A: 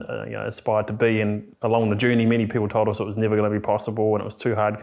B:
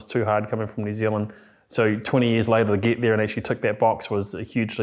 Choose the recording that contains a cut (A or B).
A